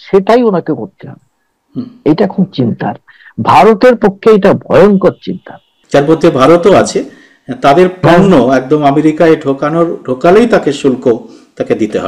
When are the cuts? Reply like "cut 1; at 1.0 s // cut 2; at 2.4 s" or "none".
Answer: cut 1; at 5.7 s